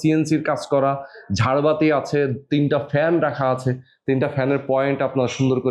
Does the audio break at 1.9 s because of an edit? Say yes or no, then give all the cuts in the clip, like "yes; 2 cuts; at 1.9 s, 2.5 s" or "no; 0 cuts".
no; 0 cuts